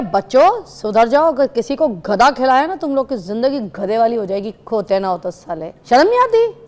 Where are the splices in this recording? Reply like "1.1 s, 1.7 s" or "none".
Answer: 5.7 s